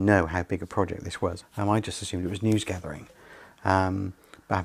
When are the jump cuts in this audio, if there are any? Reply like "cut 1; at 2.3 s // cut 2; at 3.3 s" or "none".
none

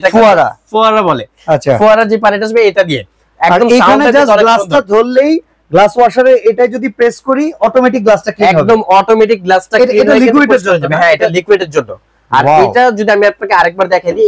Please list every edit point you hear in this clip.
none

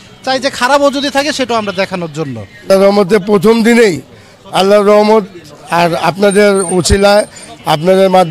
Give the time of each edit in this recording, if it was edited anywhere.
cut 1; at 2.7 s

